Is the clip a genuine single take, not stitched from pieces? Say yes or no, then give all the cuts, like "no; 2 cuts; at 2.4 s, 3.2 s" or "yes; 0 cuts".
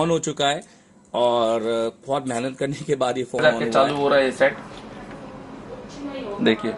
no; 1 cut; at 3.4 s